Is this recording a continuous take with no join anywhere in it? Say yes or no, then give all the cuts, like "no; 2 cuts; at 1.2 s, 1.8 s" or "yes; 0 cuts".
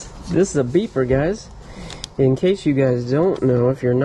yes; 0 cuts